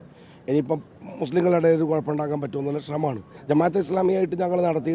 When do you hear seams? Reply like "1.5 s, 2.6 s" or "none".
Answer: 3.3 s